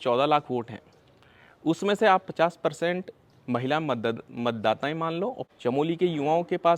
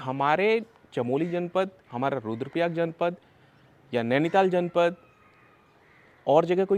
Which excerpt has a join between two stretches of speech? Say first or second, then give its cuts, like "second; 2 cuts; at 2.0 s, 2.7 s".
first; 1 cut; at 5.4 s